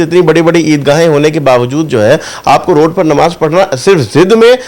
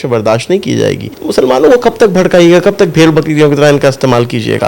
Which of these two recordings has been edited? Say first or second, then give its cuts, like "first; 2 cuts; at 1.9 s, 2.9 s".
second; 1 cut; at 1.1 s